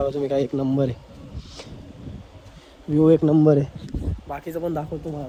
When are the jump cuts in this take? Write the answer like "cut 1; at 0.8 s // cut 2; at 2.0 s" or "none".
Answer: none